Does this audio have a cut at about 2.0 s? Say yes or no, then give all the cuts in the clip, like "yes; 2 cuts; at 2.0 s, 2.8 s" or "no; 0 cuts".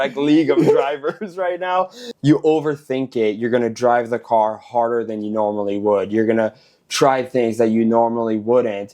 yes; 1 cut; at 2.0 s